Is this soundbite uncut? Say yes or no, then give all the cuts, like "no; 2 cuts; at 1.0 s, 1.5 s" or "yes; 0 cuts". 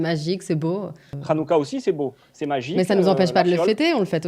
no; 1 cut; at 1.1 s